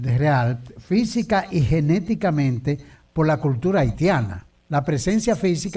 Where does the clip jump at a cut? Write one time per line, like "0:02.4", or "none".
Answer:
0:02.1